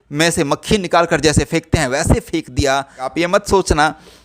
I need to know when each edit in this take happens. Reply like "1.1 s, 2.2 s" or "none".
3.1 s